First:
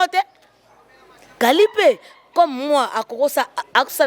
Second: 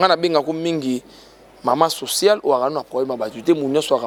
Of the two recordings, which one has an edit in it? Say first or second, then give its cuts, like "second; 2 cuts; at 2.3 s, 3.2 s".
first; 1 cut; at 1.4 s